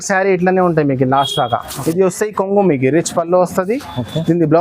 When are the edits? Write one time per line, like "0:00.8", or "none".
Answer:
0:01.7